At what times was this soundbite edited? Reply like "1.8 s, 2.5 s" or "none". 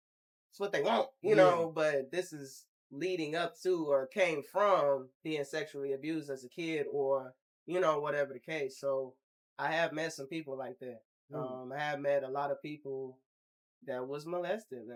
none